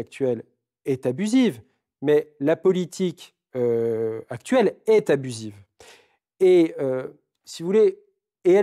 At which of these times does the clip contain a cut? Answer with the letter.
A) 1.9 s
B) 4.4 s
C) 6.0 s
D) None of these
D